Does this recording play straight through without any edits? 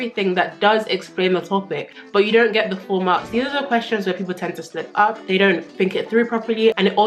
no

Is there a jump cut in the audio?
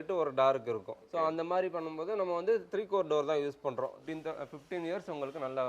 yes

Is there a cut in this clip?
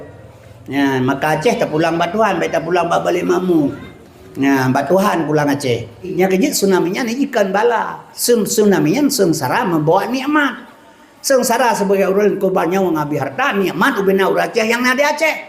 yes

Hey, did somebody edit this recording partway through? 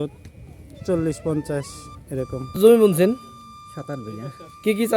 yes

